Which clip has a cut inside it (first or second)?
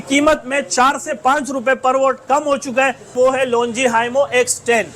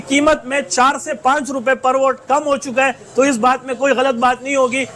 first